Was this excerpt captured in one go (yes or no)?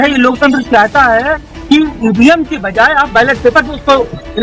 yes